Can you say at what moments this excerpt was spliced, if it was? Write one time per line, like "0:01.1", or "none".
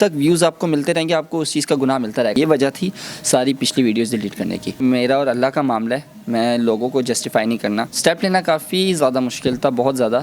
0:02.4
0:04.8
0:07.9